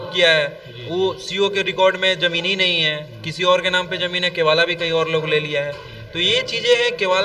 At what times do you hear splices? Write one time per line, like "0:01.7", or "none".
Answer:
none